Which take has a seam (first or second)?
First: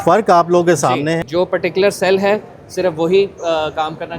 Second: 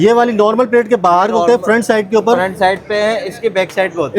first